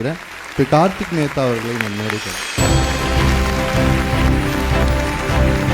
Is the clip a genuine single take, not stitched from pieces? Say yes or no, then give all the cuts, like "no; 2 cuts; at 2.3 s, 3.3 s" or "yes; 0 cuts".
no; 1 cut; at 2.5 s